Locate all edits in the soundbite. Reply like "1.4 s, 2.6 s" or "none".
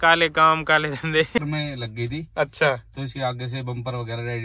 1.4 s